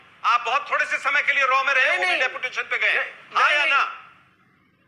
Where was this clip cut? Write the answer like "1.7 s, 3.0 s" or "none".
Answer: none